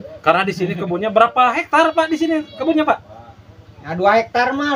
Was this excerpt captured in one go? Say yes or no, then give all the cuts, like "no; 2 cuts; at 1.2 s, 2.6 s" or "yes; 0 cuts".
yes; 0 cuts